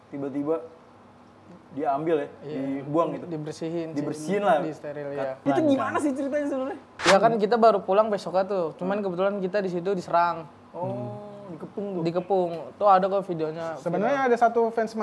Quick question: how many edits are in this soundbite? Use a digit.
2